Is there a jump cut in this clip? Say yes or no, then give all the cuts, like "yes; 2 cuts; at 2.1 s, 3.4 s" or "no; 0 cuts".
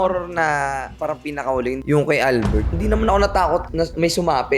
yes; 2 cuts; at 1.8 s, 2.7 s